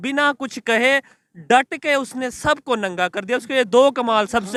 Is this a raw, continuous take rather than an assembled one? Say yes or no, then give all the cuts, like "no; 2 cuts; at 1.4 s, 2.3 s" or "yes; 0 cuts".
yes; 0 cuts